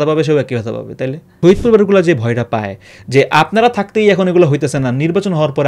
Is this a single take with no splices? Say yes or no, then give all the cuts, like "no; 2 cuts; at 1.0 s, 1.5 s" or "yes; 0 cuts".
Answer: no; 1 cut; at 1.4 s